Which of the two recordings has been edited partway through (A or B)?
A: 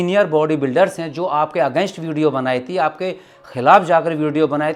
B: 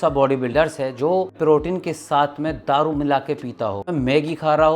B